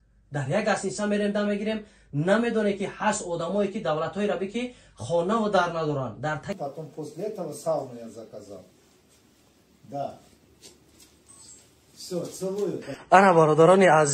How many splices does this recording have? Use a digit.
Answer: 1